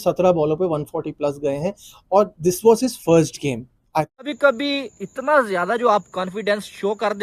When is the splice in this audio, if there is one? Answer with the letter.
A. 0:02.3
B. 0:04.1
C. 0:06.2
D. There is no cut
B